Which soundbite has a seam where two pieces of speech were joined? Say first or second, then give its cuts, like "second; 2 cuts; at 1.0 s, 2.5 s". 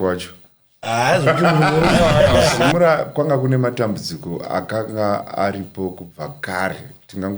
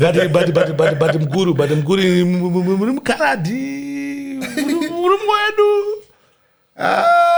first; 1 cut; at 2.6 s